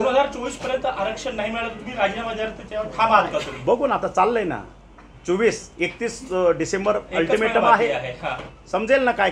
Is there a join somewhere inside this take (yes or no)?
no